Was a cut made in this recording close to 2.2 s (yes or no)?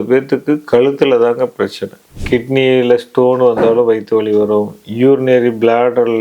yes